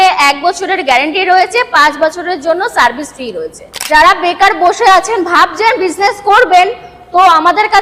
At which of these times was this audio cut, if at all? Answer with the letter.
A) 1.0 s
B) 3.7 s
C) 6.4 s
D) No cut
B